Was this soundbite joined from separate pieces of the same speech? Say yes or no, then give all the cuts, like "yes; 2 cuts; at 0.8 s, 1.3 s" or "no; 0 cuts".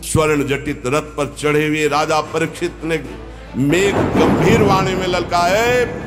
no; 0 cuts